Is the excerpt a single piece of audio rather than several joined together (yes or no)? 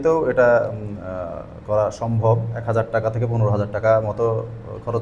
no